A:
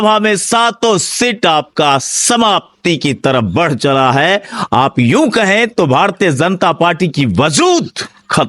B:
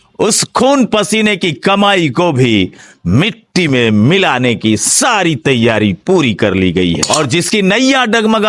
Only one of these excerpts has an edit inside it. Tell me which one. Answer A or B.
B